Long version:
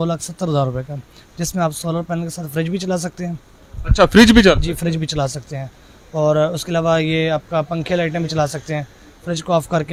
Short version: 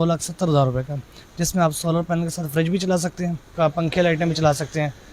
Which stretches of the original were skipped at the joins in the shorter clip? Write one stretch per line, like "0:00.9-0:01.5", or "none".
0:03.5-0:07.5